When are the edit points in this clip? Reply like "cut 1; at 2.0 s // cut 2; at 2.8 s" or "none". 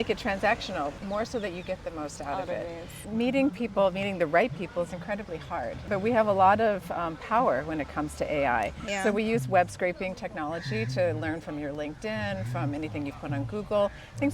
cut 1; at 1.0 s // cut 2; at 3.0 s // cut 3; at 5.8 s // cut 4; at 8.8 s